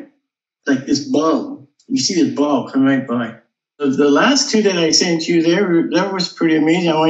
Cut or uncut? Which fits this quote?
cut